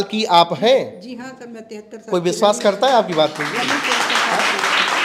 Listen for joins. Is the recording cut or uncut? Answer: uncut